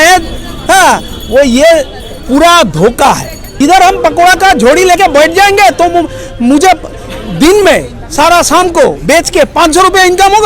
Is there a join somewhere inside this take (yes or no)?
yes